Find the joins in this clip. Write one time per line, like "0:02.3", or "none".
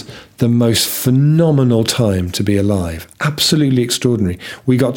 none